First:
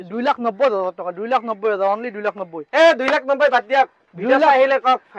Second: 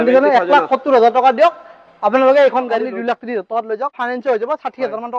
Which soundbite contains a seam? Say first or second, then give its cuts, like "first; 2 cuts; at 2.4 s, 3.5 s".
second; 2 cuts; at 2.8 s, 4.0 s